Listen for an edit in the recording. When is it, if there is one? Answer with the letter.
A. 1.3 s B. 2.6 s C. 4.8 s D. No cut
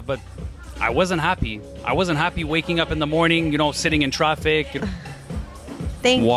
C